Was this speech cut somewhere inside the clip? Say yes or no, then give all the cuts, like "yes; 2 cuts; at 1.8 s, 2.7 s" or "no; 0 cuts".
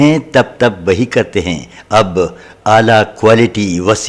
no; 0 cuts